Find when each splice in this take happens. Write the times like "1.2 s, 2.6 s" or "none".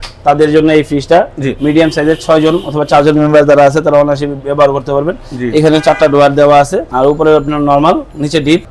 none